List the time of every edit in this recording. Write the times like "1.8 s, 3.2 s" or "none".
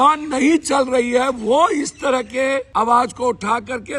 2.7 s